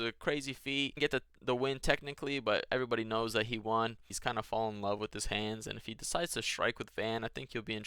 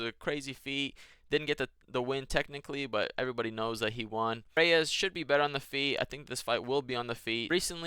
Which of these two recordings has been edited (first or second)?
first